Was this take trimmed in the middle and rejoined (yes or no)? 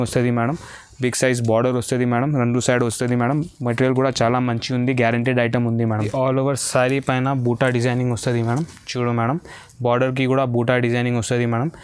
yes